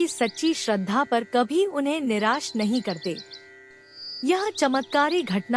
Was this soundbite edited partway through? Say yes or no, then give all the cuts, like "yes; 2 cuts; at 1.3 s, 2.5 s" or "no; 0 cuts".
no; 0 cuts